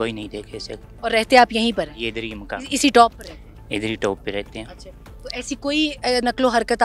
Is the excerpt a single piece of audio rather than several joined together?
yes; 0 cuts

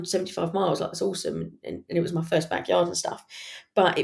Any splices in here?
no; 0 cuts

